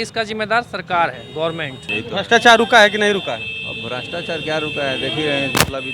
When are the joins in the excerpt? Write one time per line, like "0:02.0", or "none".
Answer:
0:01.8